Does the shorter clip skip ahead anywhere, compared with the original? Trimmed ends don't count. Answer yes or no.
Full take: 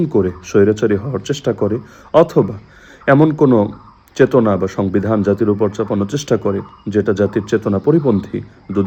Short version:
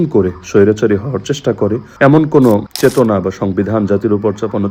yes